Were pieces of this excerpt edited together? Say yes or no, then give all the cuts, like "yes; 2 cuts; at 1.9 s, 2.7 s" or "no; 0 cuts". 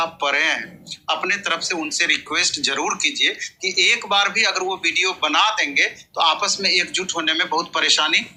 no; 0 cuts